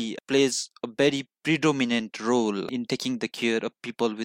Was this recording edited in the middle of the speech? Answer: no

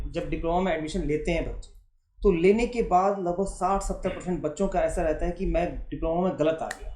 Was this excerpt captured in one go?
yes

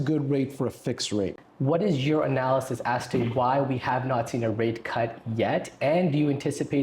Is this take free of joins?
no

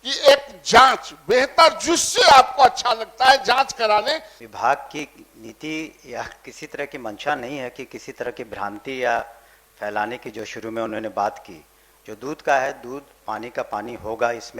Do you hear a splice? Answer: yes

